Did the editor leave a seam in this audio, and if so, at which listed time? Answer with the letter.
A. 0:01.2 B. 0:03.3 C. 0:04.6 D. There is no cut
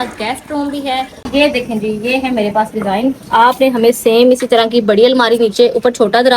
A